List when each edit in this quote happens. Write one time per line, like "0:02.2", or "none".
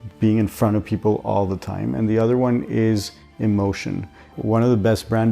0:04.3